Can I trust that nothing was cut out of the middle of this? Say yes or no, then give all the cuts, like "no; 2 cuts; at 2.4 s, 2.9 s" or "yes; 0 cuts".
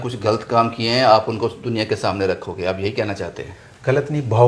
yes; 0 cuts